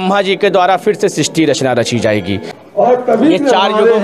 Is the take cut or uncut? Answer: cut